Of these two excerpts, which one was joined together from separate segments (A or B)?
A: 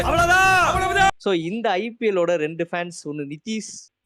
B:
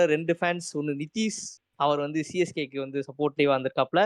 A